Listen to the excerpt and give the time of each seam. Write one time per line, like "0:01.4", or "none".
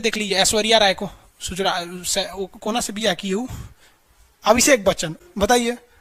none